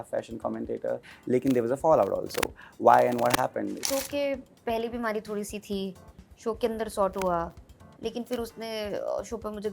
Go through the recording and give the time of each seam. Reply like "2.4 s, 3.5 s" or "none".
1.1 s, 3.8 s